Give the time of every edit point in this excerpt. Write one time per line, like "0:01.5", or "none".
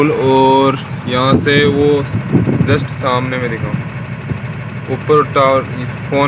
none